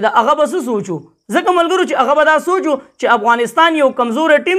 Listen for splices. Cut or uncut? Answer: uncut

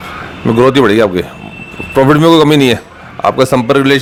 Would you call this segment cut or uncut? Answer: uncut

